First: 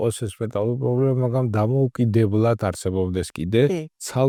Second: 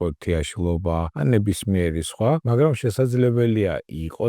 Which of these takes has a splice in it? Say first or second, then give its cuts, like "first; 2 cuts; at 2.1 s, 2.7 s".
second; 2 cuts; at 1.1 s, 2.4 s